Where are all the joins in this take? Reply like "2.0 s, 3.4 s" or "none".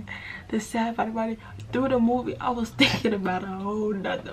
none